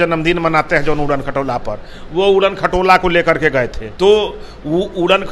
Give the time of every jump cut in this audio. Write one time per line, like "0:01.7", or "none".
0:03.8